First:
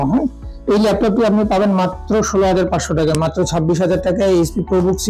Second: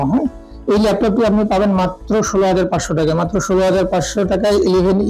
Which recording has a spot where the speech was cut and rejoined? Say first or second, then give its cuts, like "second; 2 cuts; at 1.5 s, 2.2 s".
first; 1 cut; at 3.1 s